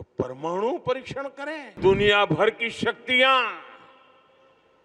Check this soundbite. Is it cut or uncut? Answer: cut